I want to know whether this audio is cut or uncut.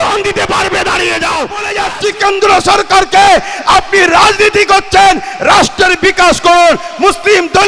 cut